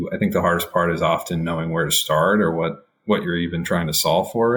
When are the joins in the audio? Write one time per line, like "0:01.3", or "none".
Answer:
none